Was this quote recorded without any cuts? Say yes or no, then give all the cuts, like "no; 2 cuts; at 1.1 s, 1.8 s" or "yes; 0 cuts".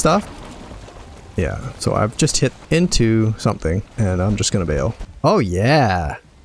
no; 1 cut; at 5.0 s